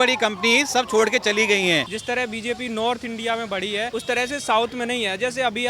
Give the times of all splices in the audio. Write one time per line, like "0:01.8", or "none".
0:01.9
0:03.9